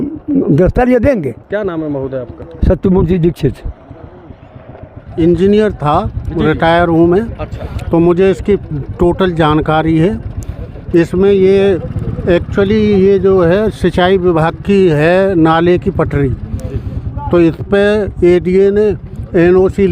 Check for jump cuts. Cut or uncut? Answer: cut